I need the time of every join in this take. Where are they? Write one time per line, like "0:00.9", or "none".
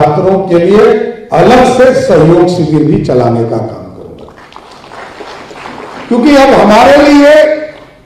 none